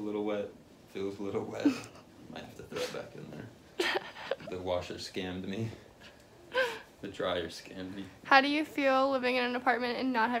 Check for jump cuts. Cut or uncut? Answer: uncut